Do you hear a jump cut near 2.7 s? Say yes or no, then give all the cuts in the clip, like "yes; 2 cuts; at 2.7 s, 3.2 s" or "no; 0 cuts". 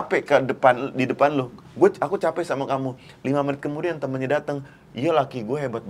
no; 0 cuts